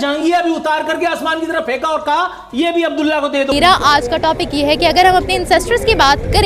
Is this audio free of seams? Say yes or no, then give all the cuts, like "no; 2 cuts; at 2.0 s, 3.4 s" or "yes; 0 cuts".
no; 1 cut; at 3.5 s